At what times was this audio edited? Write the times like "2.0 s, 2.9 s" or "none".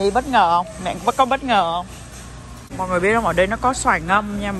2.8 s